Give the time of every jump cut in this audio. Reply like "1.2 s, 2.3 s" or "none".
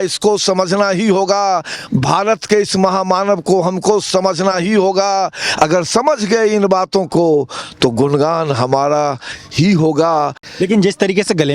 10.4 s